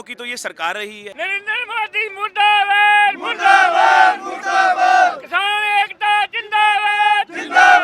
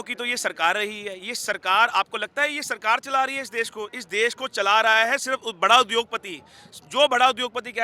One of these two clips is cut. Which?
first; 1 cut; at 1.1 s

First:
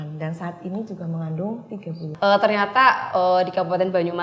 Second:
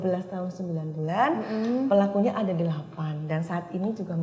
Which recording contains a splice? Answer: first; 1 cut; at 2.1 s

